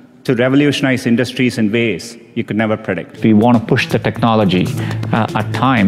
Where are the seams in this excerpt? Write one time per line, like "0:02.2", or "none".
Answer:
0:03.2